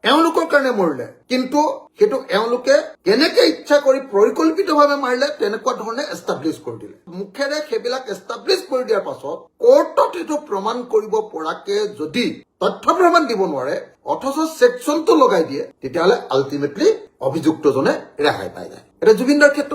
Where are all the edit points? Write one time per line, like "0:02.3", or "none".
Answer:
0:07.1

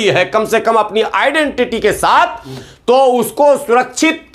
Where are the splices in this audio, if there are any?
none

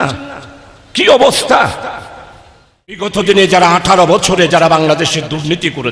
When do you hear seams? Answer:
0:03.1

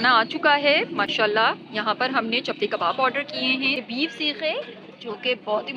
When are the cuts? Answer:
0:03.8

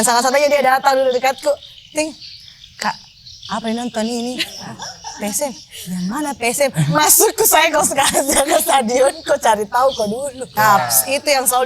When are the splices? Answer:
0:10.4

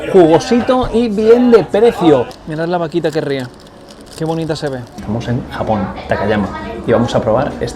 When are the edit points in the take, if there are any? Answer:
0:02.4
0:04.9

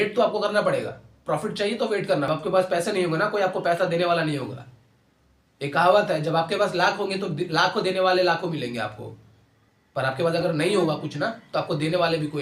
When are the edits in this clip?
0:02.3

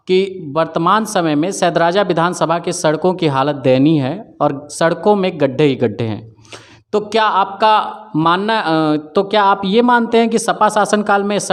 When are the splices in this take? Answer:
none

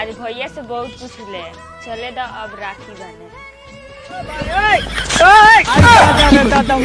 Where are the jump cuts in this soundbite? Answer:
0:04.4

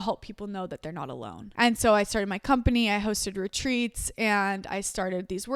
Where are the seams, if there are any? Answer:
none

